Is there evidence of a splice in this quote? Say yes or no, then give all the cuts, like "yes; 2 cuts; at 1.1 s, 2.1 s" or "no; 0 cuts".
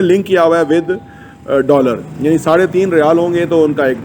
no; 0 cuts